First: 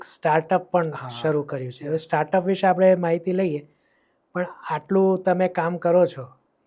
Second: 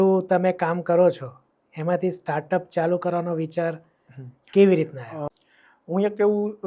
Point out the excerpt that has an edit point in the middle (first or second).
second